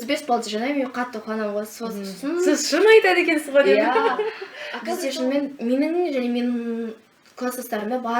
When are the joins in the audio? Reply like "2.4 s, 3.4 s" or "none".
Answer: 4.3 s